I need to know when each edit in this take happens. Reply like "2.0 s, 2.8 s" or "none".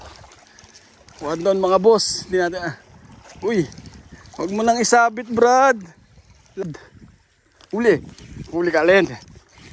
6.6 s